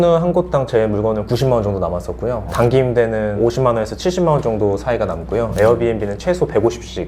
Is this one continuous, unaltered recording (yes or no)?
yes